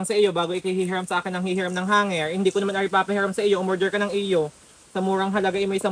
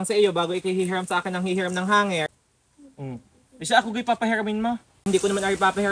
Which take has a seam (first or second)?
first